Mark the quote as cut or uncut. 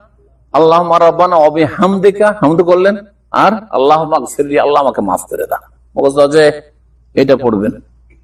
uncut